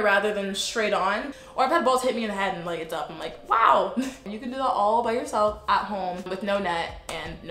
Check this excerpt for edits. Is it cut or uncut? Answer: cut